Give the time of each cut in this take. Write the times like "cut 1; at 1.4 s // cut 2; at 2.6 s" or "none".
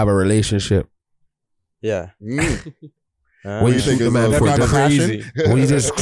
none